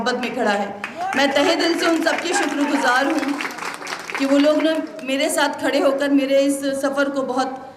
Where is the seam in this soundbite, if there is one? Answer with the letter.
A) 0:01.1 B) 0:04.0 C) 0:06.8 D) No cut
D